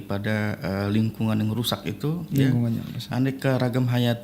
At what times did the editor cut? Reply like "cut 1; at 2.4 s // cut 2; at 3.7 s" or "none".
none